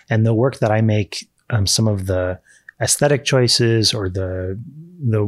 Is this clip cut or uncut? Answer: uncut